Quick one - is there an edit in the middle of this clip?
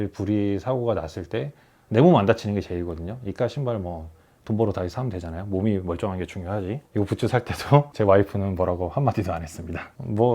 yes; 2 cuts; at 6.8 s, 7.9 s

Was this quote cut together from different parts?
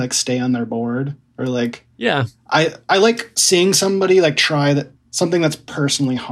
yes; 1 cut; at 4.9 s

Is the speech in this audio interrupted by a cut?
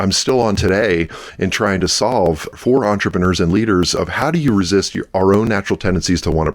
yes; 1 cut; at 2.5 s

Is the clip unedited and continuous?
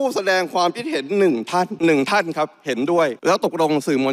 no; 2 cuts; at 1.7 s, 3.2 s

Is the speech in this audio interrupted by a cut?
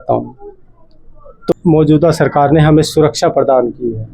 yes; 1 cut; at 1.4 s

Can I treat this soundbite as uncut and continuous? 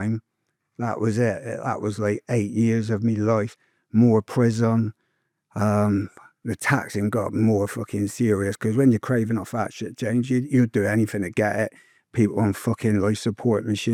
yes; 0 cuts

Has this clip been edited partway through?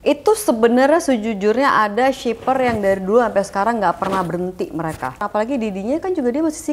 yes; 1 cut; at 5.2 s

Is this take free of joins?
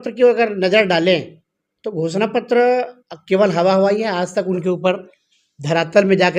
yes; 0 cuts

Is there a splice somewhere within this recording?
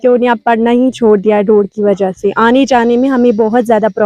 no; 0 cuts

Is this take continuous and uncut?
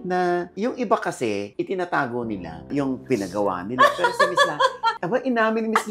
no; 2 cuts; at 2.6 s, 5.0 s

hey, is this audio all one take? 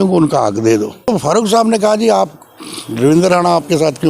no; 1 cut; at 1.1 s

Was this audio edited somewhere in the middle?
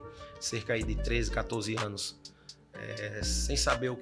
no; 0 cuts

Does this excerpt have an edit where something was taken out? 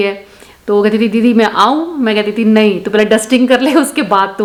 no; 0 cuts

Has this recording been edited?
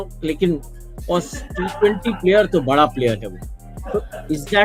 no; 0 cuts

